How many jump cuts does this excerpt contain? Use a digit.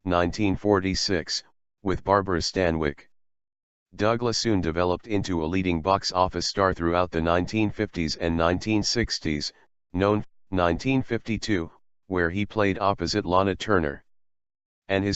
0